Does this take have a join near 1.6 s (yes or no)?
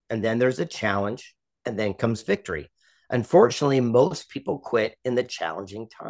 no